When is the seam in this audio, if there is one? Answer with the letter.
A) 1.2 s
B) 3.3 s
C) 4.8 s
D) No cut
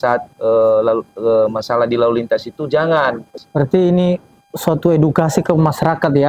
B